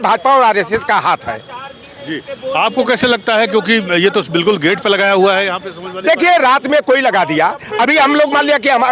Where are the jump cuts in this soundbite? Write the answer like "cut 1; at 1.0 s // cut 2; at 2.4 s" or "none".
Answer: none